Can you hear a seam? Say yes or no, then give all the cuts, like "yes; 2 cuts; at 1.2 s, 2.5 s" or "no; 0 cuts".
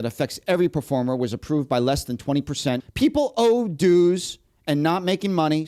yes; 1 cut; at 2.8 s